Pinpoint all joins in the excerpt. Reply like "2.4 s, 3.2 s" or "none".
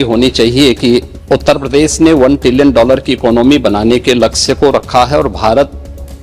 1.1 s